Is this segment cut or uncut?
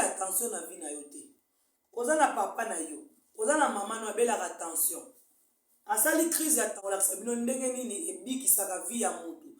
cut